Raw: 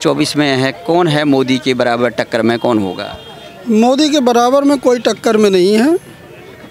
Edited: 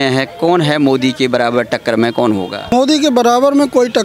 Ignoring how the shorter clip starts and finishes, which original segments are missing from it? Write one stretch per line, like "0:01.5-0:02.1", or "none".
0:03.2-0:03.8